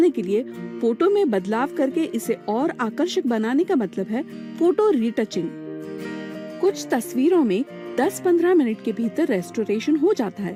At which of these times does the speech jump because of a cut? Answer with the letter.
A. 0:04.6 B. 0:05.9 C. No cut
C